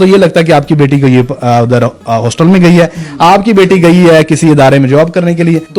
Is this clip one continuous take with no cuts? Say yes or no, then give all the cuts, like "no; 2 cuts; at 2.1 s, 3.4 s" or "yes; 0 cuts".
yes; 0 cuts